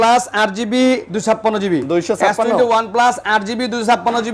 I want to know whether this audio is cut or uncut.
uncut